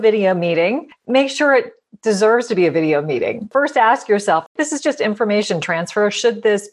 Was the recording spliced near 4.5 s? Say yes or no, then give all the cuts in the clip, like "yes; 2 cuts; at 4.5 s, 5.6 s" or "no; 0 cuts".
yes; 2 cuts; at 3.5 s, 4.5 s